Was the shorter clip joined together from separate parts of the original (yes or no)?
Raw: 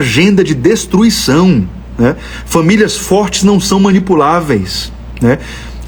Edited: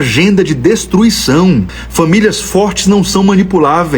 yes